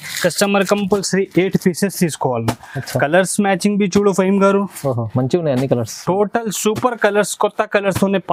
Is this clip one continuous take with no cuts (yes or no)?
yes